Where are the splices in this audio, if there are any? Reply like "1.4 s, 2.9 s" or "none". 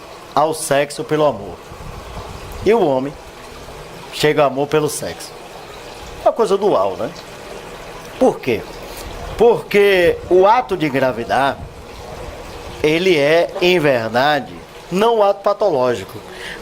1.1 s

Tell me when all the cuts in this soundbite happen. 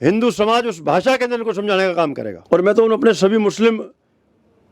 2.3 s

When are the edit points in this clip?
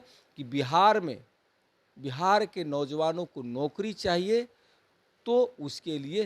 none

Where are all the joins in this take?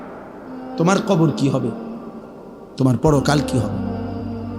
3.5 s

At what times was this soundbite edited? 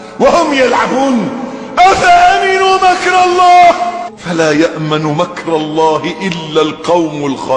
none

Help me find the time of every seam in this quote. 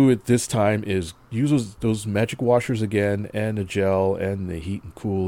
1.2 s

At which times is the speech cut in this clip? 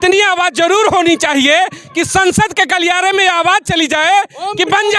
none

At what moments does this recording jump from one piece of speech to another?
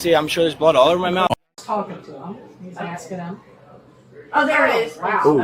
1.4 s

